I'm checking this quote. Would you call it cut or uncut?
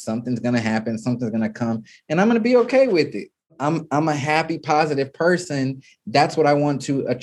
cut